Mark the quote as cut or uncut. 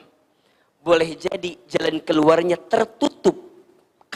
uncut